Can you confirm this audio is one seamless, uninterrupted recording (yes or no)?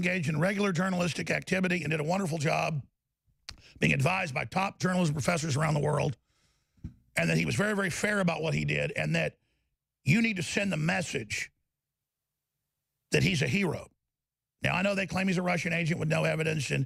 yes